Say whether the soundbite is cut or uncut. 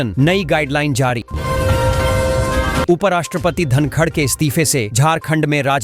cut